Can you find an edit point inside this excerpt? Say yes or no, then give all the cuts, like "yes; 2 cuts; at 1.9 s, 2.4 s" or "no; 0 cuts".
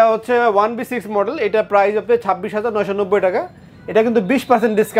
no; 0 cuts